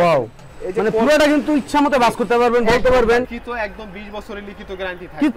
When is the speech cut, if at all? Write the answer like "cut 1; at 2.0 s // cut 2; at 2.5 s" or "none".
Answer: cut 1; at 3.4 s